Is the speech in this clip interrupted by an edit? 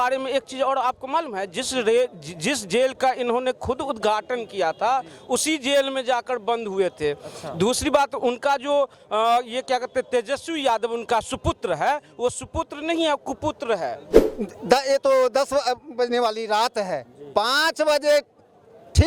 yes; 1 cut; at 14.1 s

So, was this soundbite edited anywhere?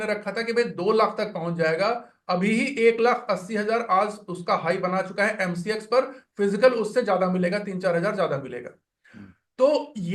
no; 0 cuts

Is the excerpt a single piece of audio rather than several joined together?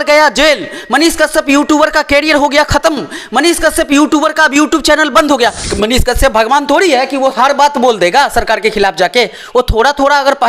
no; 1 cut; at 5.7 s

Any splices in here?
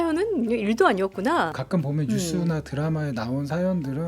yes; 1 cut; at 1.6 s

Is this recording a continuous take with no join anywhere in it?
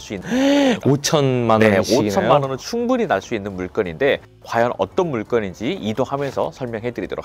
yes; 0 cuts

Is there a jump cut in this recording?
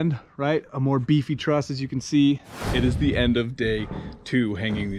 yes; 1 cut; at 2.6 s

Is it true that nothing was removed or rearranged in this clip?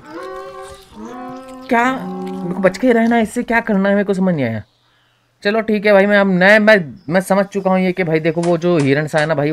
yes; 0 cuts

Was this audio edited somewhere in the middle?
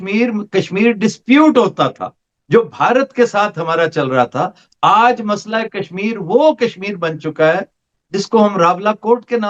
no; 0 cuts

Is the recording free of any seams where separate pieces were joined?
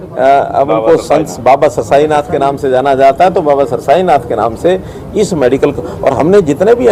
yes; 0 cuts

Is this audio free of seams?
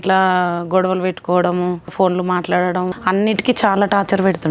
no; 2 cuts; at 1.9 s, 3.0 s

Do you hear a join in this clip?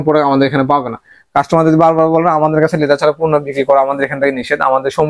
no; 0 cuts

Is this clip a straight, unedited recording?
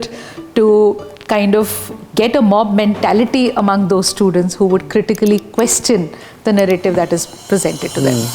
yes; 0 cuts

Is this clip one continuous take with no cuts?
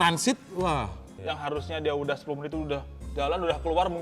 no; 1 cut; at 1.2 s

